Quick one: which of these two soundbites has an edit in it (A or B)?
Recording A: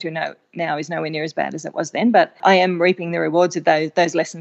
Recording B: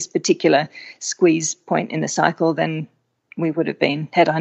A